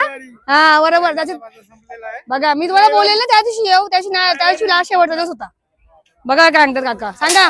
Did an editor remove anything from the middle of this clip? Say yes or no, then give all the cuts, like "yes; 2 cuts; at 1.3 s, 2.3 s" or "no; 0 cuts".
no; 0 cuts